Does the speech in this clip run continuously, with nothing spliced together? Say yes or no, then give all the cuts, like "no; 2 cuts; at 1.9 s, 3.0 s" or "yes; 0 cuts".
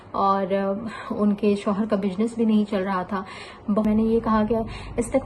no; 1 cut; at 3.9 s